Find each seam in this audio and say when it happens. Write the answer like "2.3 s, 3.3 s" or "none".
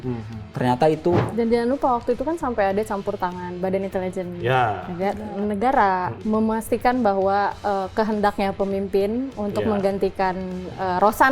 1.2 s, 6.1 s